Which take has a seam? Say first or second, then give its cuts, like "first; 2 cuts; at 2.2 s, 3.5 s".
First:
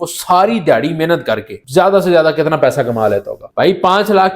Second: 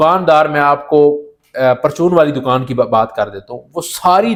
first; 2 cuts; at 1.5 s, 3.4 s